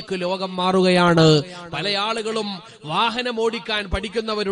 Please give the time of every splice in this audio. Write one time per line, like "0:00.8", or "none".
none